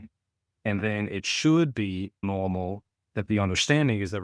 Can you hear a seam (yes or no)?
yes